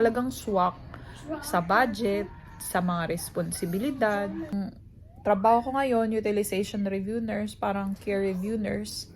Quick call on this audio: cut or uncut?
cut